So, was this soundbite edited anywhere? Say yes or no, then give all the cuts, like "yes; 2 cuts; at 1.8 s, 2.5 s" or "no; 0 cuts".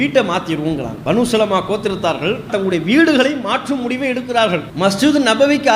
yes; 3 cuts; at 0.9 s, 2.5 s, 4.7 s